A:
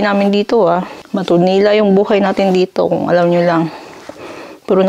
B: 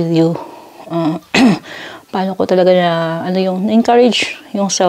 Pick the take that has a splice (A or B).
A